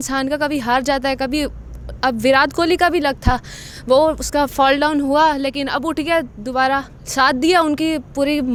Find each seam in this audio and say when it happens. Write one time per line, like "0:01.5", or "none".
none